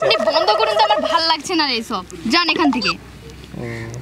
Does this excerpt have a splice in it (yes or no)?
no